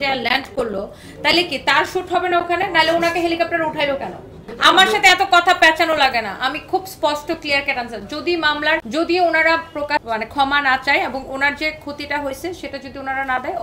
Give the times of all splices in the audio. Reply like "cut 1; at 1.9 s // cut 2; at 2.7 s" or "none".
cut 1; at 4.5 s // cut 2; at 8.9 s // cut 3; at 10.0 s